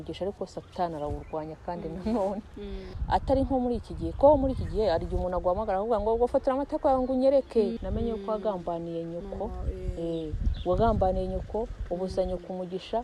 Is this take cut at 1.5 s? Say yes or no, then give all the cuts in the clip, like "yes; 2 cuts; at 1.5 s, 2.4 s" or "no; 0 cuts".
no; 2 cuts; at 2.9 s, 7.8 s